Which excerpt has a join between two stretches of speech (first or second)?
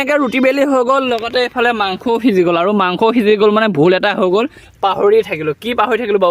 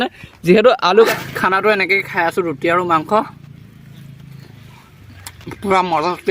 second